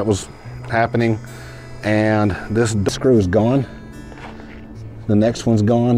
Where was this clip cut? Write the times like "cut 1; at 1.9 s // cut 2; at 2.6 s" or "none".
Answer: cut 1; at 2.9 s